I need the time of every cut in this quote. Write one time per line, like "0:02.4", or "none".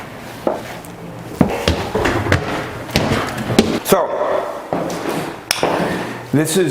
none